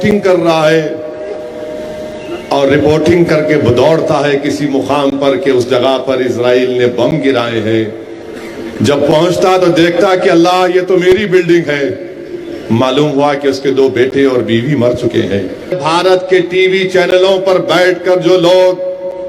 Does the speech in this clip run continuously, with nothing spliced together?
no; 1 cut; at 15.8 s

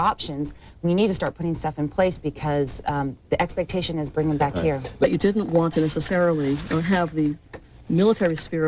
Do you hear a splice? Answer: yes; 1 cut; at 5.0 s

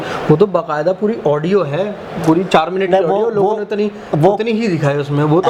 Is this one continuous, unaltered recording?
yes; 0 cuts

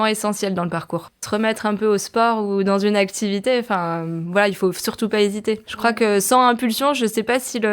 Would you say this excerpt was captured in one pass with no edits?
no; 2 cuts; at 1.1 s, 5.6 s

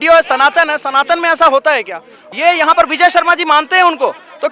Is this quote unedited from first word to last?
no; 1 cut; at 2.2 s

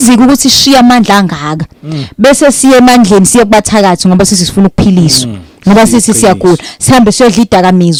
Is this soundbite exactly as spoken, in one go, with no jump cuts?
yes; 0 cuts

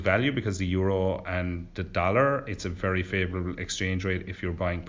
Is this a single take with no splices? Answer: yes; 0 cuts

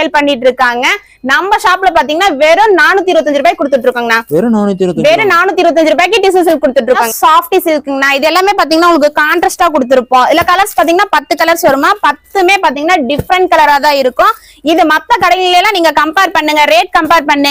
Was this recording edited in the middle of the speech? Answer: no; 0 cuts

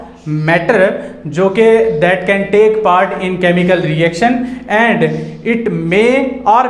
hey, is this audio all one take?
yes; 0 cuts

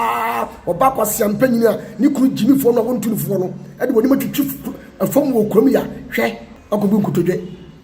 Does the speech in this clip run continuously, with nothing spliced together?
no; 1 cut; at 6.5 s

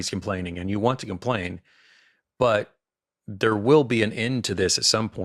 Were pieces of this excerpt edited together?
no; 0 cuts

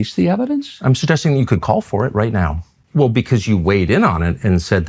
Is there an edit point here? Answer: yes; 1 cut; at 2.8 s

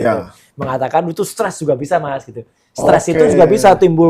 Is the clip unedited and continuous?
yes; 0 cuts

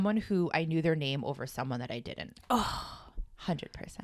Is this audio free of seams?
yes; 0 cuts

